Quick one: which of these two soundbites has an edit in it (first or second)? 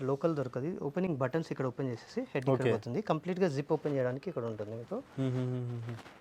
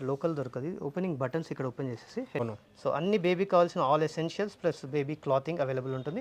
second